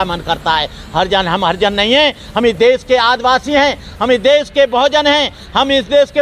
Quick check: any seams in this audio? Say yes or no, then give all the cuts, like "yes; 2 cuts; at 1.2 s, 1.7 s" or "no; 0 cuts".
no; 0 cuts